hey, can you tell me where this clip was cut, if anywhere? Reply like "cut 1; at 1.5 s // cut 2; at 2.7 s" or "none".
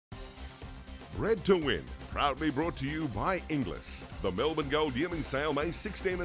cut 1; at 1.1 s